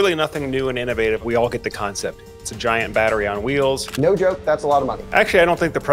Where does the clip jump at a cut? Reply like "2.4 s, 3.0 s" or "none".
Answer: 1.2 s, 3.9 s, 5.0 s